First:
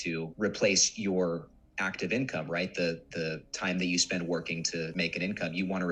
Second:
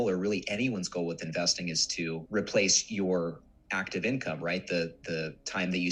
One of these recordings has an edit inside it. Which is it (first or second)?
first